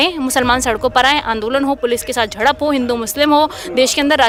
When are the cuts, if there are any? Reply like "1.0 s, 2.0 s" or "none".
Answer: none